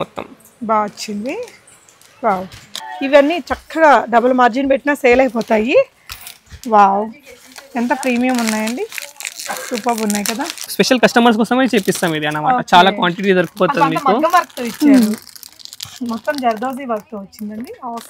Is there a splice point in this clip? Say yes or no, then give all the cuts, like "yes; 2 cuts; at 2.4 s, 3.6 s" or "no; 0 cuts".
yes; 2 cuts; at 2.7 s, 10.7 s